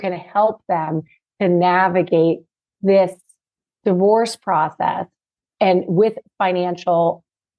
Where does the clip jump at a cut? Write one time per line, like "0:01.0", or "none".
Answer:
none